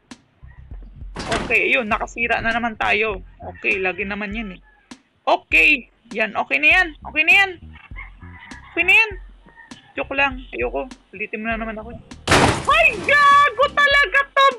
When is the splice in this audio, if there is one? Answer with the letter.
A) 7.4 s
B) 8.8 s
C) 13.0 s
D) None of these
D